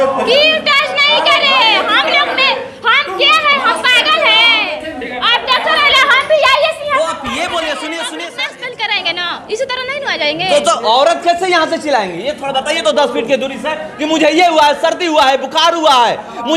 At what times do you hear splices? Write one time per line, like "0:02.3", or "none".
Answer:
0:08.3